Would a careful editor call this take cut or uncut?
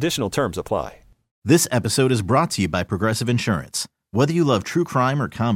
cut